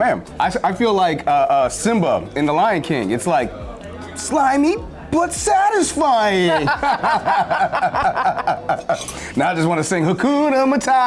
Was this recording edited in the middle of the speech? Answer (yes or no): no